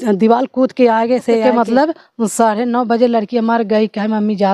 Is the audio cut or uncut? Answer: cut